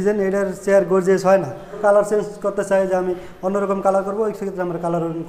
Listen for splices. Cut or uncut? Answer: cut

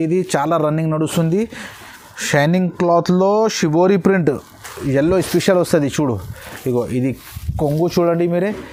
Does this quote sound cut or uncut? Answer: uncut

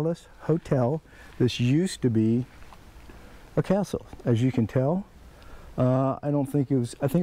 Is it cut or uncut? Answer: uncut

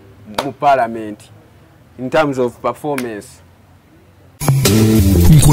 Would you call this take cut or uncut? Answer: cut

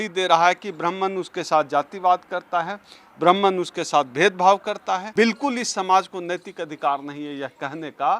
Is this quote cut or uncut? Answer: cut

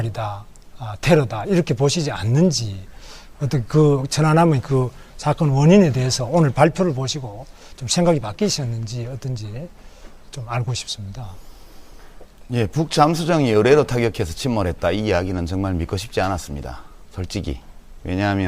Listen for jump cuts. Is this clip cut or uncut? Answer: cut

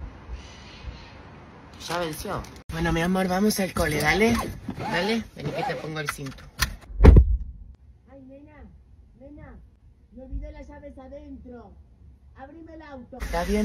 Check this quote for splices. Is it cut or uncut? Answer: cut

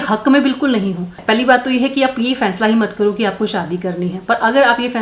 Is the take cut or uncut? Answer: uncut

